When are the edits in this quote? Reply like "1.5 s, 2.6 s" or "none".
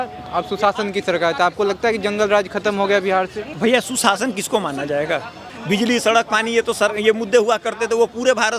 3.5 s, 5.5 s